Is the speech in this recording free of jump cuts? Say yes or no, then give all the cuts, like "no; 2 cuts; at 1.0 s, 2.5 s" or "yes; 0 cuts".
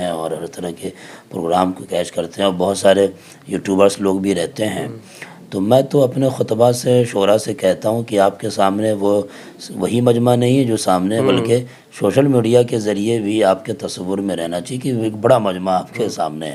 yes; 0 cuts